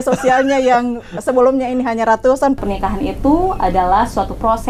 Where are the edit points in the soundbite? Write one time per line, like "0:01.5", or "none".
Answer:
0:02.6